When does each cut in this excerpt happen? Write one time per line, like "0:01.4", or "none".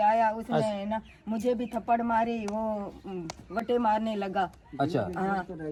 none